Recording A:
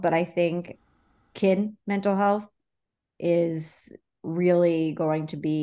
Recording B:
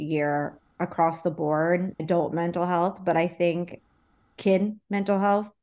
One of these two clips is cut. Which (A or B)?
B